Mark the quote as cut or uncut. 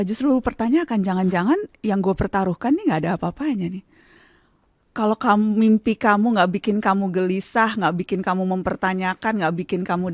uncut